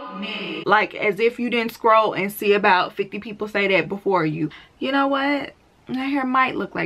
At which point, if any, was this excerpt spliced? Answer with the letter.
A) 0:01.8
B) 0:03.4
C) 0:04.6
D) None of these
C